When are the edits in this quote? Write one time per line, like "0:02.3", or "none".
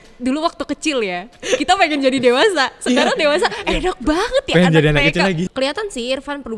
0:05.5